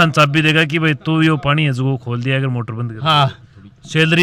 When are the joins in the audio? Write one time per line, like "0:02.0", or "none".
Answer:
none